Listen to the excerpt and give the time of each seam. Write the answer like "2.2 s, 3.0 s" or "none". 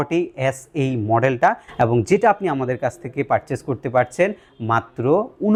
none